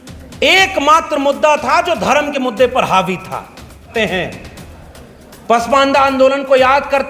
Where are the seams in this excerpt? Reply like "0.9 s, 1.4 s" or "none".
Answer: 3.9 s